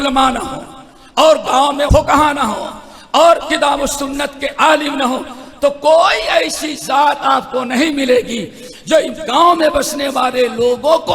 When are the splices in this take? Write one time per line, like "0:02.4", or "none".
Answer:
0:01.9